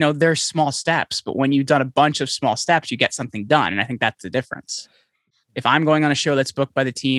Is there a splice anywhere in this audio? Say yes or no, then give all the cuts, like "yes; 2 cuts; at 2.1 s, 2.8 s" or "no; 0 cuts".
yes; 1 cut; at 5.3 s